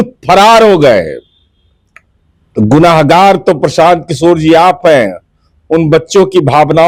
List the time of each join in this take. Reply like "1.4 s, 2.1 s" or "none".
none